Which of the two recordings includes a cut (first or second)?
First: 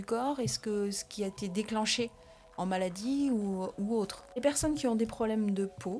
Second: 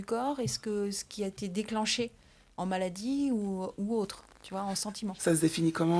first